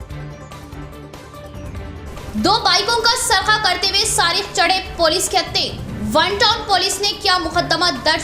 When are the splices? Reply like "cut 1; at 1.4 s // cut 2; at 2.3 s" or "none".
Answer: cut 1; at 2.0 s